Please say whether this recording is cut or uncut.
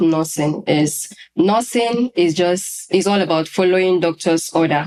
uncut